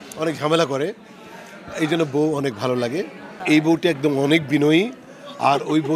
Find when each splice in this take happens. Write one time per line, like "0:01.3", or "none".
0:03.4